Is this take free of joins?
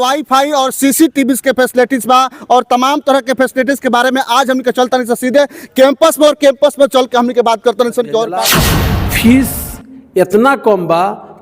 no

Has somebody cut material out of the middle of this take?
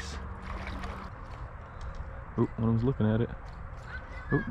yes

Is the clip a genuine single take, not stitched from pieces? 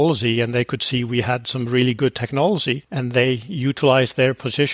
yes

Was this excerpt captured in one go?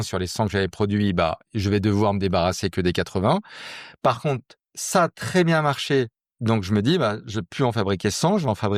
yes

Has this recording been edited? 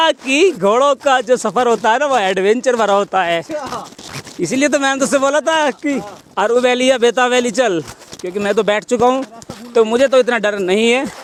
no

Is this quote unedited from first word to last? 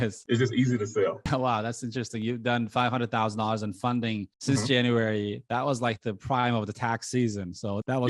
yes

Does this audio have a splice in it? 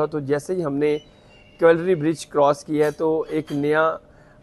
no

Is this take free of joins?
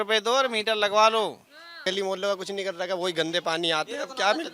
no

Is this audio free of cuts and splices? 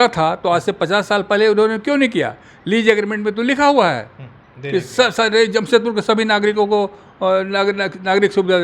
yes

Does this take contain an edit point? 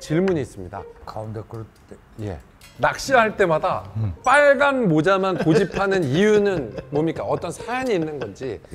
no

